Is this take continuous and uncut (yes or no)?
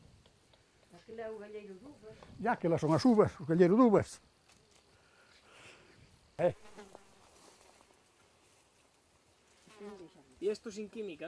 no